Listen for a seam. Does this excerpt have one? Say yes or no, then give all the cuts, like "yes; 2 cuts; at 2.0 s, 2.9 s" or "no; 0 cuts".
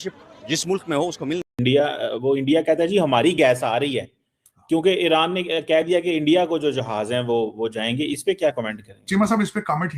yes; 1 cut; at 1.5 s